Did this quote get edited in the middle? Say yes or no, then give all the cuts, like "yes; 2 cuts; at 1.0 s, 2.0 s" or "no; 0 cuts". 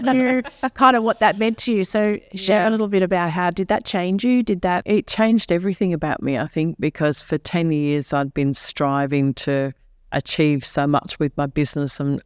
yes; 1 cut; at 4.8 s